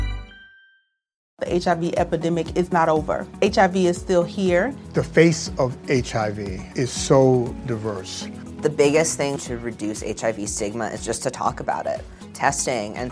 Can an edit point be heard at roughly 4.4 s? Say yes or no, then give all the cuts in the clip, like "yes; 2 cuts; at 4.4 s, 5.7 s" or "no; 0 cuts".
no; 1 cut; at 1.3 s